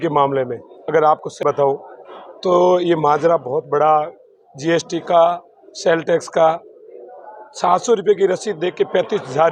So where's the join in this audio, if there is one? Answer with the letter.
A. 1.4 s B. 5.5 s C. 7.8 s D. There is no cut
A